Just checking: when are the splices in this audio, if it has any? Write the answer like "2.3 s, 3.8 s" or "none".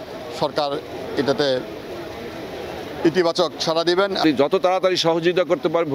4.2 s